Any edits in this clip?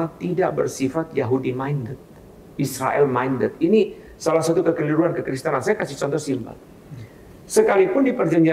no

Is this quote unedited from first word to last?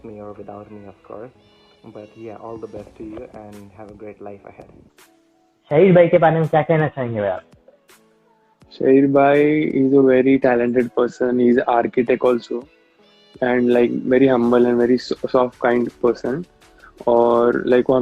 yes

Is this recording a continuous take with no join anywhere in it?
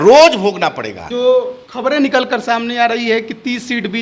no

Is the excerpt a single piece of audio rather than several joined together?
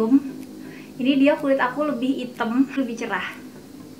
no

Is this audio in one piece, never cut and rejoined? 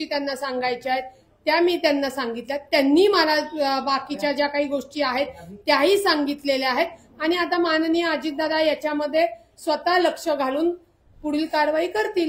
yes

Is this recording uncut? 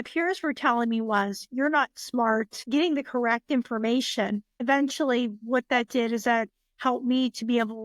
no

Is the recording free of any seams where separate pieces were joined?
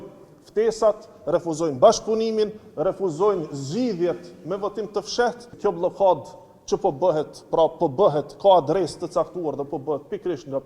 no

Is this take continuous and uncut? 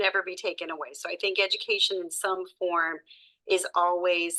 yes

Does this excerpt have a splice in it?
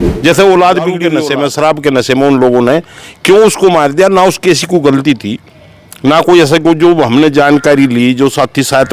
yes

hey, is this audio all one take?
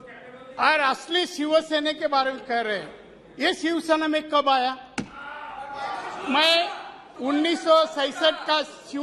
yes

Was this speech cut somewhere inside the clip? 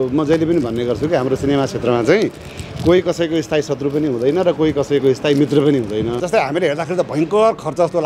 yes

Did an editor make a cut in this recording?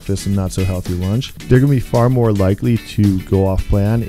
yes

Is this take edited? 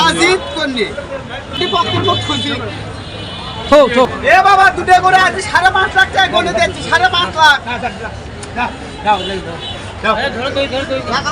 yes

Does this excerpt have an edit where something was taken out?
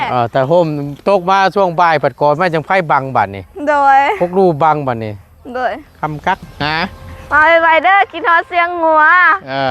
yes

